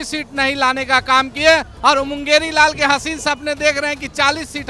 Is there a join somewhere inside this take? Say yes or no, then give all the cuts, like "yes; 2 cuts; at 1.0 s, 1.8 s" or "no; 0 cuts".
no; 0 cuts